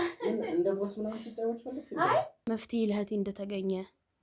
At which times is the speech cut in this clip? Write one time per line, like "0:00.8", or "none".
0:02.4